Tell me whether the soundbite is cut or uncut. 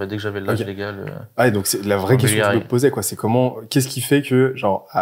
uncut